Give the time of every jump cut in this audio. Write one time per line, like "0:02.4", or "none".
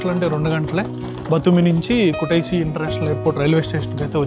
none

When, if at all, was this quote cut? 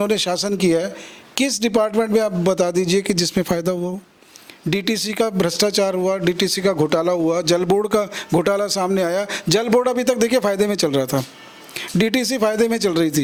none

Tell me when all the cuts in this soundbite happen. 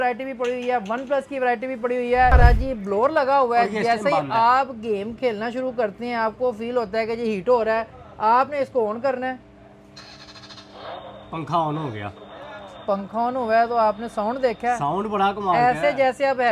0:02.3

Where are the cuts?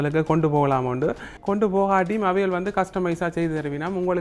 none

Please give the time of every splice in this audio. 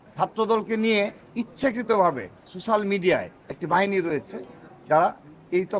none

